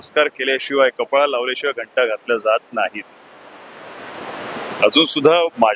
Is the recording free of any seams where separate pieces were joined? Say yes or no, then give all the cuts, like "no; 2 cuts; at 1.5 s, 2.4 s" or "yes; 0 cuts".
yes; 0 cuts